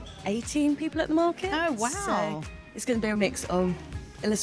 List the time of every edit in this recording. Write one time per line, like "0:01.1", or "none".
none